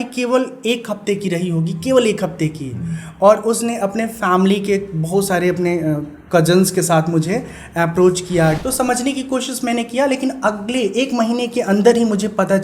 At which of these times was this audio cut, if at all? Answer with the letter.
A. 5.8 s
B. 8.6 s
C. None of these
B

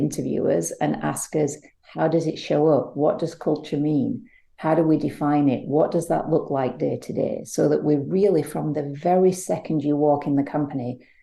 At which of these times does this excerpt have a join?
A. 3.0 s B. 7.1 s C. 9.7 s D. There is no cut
D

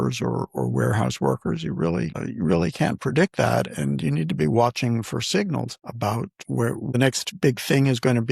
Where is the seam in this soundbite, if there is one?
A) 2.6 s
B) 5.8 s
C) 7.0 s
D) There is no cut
C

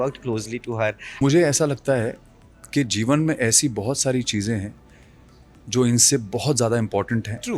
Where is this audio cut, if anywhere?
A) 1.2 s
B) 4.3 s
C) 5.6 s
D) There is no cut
A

